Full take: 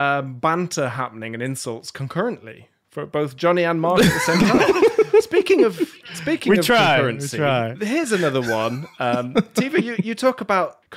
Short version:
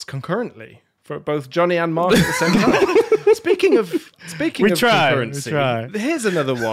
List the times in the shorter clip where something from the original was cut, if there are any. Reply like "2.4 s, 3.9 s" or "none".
none

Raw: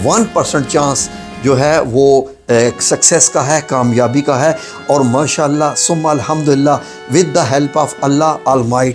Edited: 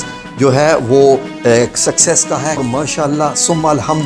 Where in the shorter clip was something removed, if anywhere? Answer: 2.6 s

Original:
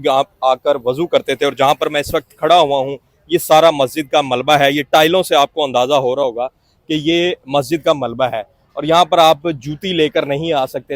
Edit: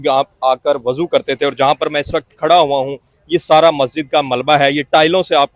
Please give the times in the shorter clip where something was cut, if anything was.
none

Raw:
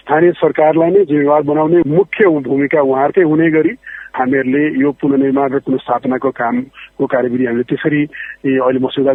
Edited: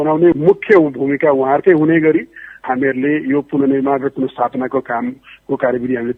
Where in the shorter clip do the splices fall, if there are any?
none

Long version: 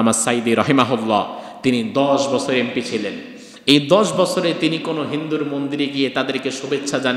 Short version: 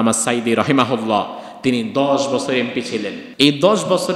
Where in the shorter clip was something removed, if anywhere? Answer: 3.2 s

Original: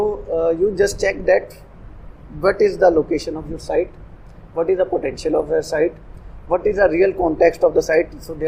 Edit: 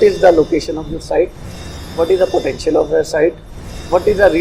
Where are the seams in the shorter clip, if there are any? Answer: none

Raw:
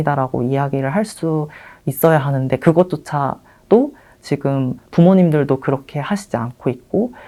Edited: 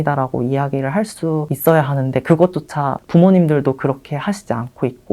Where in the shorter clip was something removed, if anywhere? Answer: 1.5 s, 3.0 s

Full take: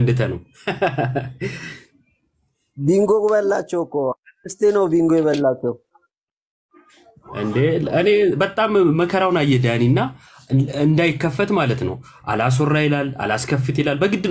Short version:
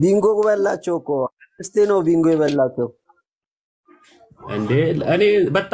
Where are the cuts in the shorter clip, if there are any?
none

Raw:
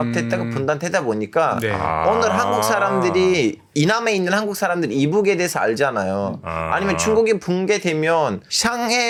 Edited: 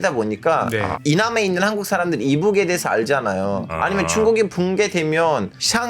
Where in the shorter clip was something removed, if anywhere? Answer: 0.9 s, 3.7 s

